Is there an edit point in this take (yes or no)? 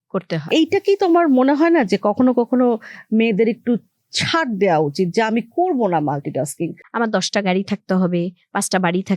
yes